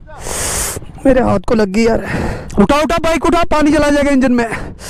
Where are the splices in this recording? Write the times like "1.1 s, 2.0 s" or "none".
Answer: 2.4 s